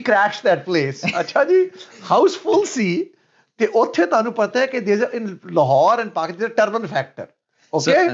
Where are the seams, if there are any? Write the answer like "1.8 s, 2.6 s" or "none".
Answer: none